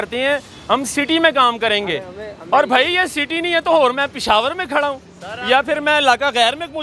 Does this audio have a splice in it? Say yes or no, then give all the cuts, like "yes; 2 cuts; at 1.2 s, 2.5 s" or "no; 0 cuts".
no; 0 cuts